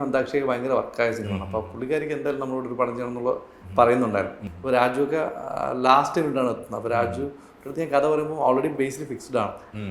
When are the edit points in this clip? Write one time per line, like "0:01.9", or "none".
0:04.5